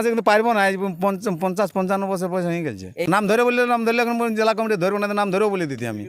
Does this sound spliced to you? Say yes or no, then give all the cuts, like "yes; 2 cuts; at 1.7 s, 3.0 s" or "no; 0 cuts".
yes; 1 cut; at 3.0 s